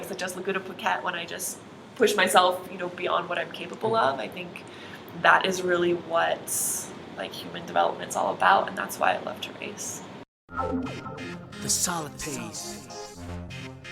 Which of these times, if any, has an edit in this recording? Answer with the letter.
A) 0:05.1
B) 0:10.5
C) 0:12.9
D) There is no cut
B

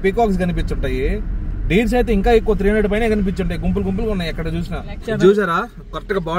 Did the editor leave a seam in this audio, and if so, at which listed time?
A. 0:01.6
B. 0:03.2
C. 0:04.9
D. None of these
D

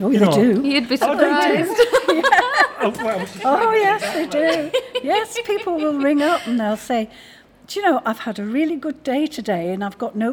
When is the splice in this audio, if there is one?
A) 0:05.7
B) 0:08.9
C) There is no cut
C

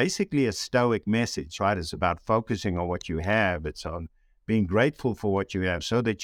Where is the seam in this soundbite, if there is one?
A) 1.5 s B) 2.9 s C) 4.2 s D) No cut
A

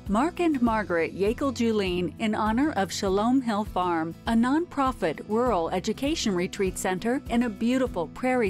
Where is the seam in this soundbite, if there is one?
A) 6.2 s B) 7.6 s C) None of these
C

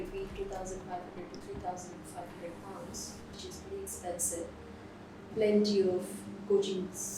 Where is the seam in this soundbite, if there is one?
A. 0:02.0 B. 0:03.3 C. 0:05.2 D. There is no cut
C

